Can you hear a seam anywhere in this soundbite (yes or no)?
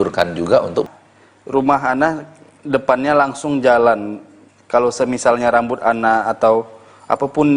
yes